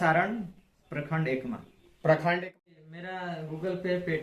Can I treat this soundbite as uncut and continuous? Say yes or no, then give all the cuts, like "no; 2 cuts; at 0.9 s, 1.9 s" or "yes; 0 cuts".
no; 1 cut; at 2.4 s